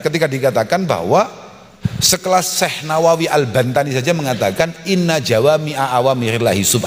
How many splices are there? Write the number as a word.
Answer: one